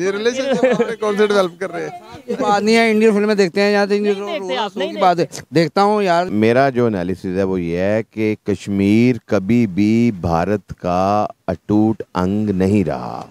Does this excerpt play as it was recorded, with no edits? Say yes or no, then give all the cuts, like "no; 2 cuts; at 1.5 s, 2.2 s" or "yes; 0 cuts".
no; 1 cut; at 6.3 s